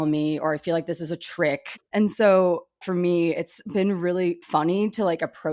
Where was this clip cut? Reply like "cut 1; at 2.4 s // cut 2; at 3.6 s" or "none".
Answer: cut 1; at 1.8 s // cut 2; at 4.4 s